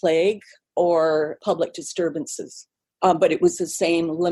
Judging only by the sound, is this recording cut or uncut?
uncut